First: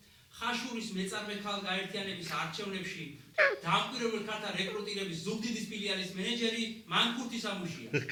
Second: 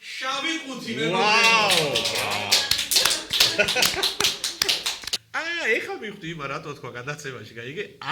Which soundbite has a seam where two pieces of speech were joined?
second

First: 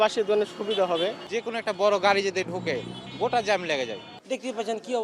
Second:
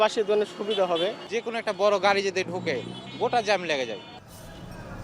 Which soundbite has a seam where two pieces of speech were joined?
first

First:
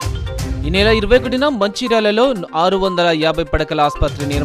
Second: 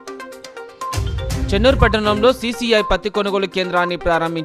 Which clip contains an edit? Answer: second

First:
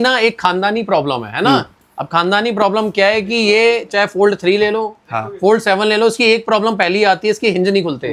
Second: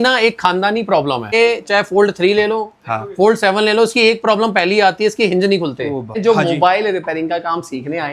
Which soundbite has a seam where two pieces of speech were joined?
second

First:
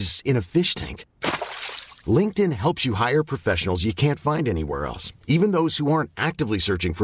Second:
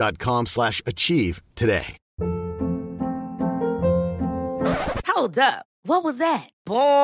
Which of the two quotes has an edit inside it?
second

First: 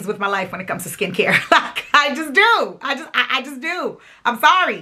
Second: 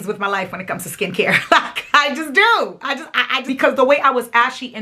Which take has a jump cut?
second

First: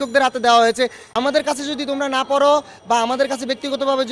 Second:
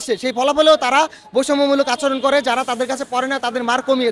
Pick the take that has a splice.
first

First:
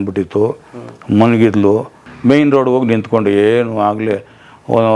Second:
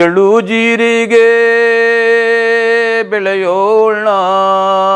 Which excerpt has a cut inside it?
first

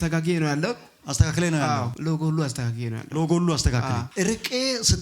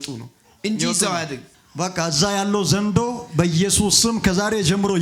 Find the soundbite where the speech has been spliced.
first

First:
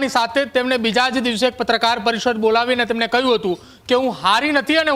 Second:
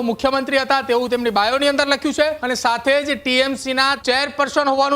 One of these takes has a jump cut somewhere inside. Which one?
second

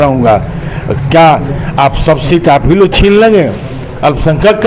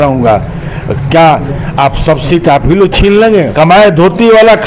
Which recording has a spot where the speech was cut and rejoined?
second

